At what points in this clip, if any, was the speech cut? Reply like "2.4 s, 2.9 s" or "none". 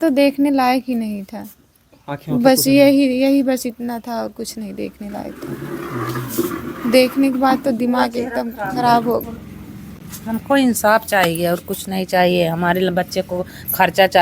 9.3 s